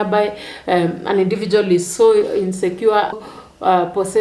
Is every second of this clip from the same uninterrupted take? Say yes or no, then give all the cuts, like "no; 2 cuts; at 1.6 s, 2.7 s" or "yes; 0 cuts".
no; 1 cut; at 3.2 s